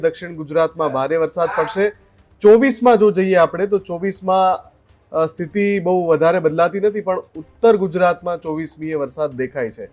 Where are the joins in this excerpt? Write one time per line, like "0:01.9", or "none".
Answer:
none